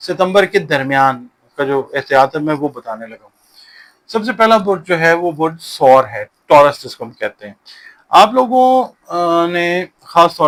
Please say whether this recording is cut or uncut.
uncut